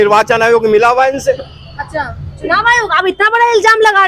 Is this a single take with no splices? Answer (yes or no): yes